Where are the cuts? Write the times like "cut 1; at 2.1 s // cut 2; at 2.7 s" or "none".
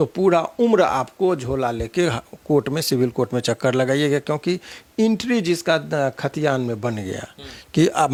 none

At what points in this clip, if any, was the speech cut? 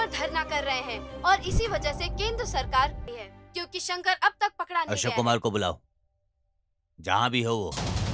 cut 1; at 3.1 s

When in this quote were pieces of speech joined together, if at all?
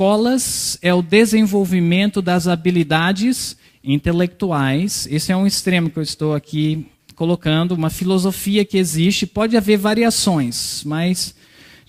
cut 1; at 10.4 s

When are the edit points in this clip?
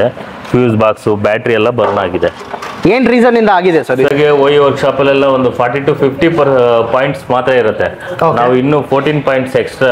cut 1; at 4.1 s

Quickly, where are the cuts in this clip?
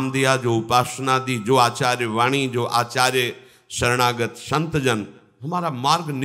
none

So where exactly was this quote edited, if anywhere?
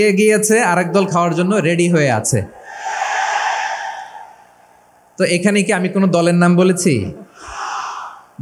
none

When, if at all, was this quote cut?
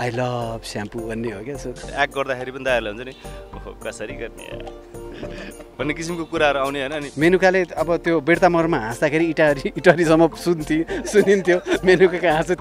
cut 1; at 1.9 s // cut 2; at 7.0 s

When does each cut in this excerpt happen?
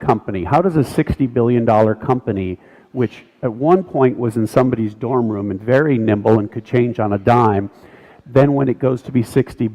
cut 1; at 6.4 s

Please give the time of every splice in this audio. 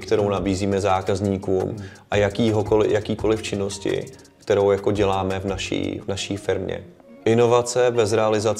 cut 1; at 6.9 s

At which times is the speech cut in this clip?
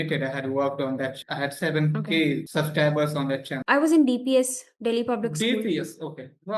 cut 1; at 1.2 s // cut 2; at 2.4 s // cut 3; at 3.5 s

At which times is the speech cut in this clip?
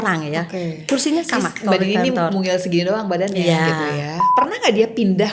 cut 1; at 4.2 s

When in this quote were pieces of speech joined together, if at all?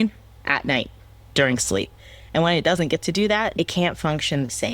cut 1; at 3.5 s

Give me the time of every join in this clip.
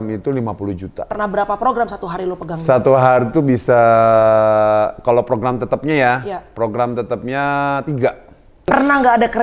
cut 1; at 1.1 s // cut 2; at 8.7 s

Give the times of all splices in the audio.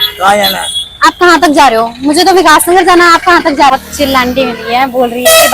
cut 1; at 3.7 s

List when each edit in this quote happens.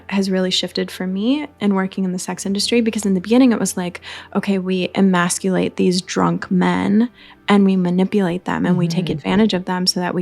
cut 1; at 1.5 s

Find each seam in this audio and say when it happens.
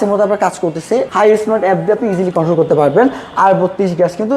cut 1; at 1.1 s

